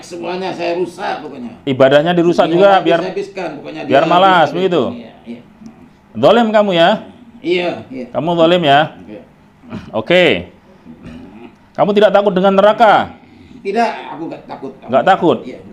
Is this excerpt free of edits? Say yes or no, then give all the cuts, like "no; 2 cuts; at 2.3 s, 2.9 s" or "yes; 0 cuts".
yes; 0 cuts